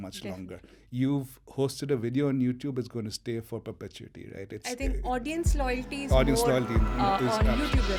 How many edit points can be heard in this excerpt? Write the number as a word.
zero